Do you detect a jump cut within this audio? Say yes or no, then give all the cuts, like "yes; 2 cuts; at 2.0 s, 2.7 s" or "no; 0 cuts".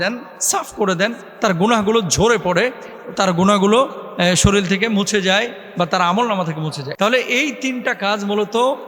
yes; 1 cut; at 6.8 s